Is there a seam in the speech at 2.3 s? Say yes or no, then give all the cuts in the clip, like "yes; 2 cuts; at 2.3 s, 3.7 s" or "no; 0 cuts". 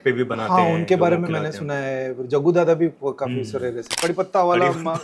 no; 1 cut; at 3.9 s